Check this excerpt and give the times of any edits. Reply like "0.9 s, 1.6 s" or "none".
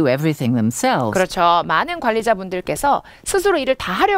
none